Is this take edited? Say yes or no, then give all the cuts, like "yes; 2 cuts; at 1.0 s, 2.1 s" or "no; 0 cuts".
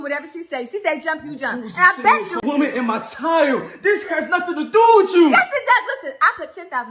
yes; 1 cut; at 2.4 s